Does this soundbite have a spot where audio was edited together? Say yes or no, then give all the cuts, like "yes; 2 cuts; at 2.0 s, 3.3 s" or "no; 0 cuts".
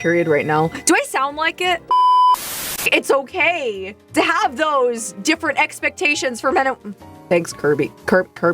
yes; 2 cuts; at 1.9 s, 2.8 s